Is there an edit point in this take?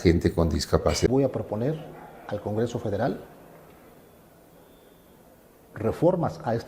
yes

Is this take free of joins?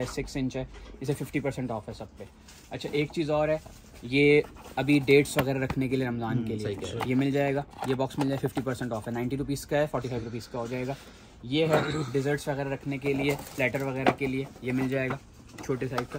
yes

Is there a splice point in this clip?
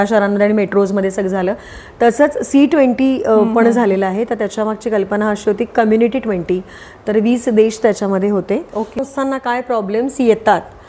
yes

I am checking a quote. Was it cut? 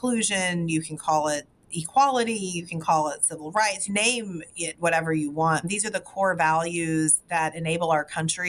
yes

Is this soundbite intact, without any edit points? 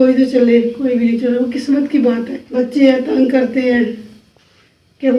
no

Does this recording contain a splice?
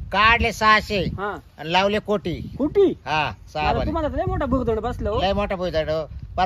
no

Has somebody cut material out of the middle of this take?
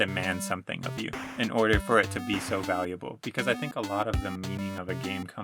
yes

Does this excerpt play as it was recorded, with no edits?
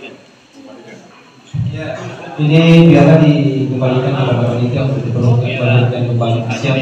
yes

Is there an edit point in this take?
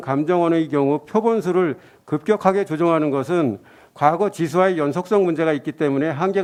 no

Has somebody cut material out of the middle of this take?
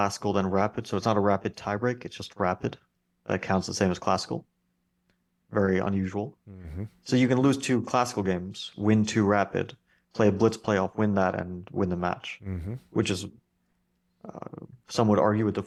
no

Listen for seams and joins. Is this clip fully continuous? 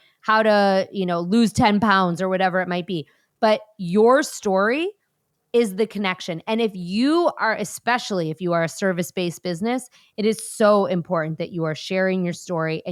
yes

